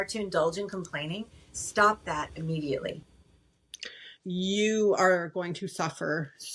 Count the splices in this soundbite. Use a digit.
1